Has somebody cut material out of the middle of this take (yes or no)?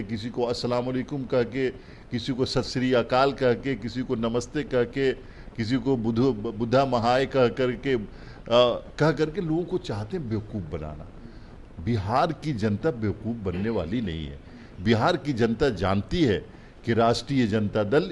no